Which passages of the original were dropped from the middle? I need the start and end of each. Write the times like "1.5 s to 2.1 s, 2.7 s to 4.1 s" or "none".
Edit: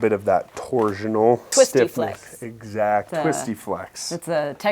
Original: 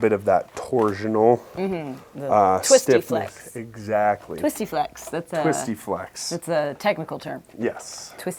1.5 s to 2.6 s, 4.2 s to 5.3 s